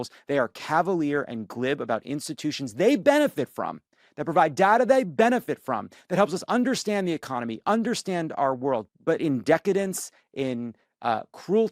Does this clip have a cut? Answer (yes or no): yes